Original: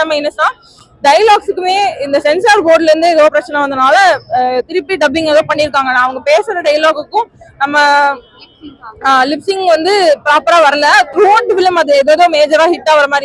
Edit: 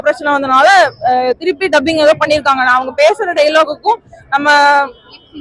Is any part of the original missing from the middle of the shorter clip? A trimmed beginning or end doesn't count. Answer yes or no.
no